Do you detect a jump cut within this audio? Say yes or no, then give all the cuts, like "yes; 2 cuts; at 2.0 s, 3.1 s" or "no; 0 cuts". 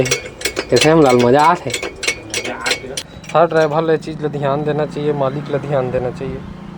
yes; 1 cut; at 3.0 s